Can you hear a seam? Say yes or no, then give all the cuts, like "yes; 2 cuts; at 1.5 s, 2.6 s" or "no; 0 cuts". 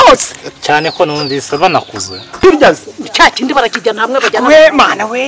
yes; 1 cut; at 2.4 s